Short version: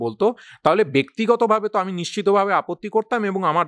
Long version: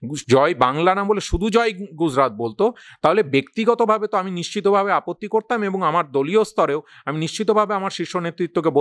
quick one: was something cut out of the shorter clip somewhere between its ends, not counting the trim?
no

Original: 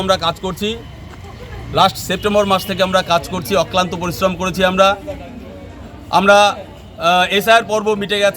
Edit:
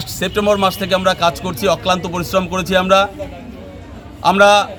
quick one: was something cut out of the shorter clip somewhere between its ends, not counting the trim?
no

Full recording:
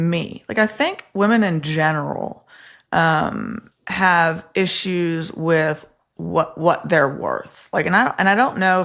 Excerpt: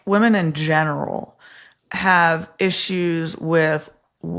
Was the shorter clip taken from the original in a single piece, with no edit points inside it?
no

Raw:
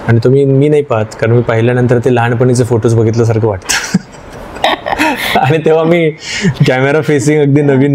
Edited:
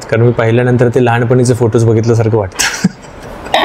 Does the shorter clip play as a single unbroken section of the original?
yes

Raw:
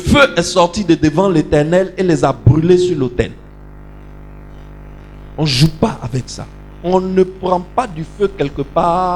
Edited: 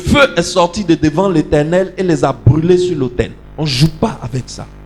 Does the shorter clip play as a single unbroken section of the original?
no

